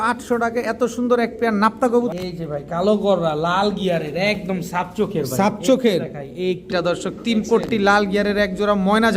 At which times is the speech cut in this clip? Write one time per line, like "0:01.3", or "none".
0:02.1
0:06.7